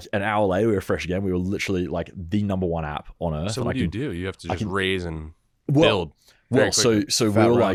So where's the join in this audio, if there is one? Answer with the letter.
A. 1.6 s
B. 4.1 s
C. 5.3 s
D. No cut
D